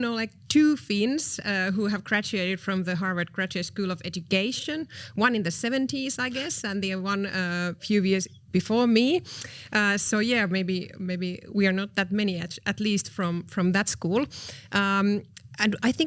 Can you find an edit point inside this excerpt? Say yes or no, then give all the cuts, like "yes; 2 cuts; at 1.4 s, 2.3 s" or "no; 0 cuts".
no; 0 cuts